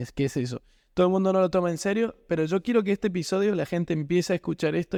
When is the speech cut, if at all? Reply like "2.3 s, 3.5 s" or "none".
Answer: none